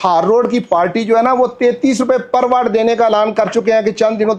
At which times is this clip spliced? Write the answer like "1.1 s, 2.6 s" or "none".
none